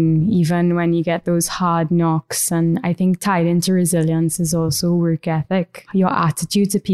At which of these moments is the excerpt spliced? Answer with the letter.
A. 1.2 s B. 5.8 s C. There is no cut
B